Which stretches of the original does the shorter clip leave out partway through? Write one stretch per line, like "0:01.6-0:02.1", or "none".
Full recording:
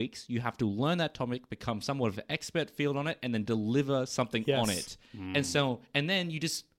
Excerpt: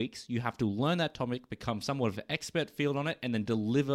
none